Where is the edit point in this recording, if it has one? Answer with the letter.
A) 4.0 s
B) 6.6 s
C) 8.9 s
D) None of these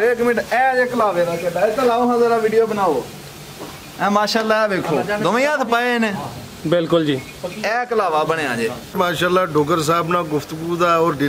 C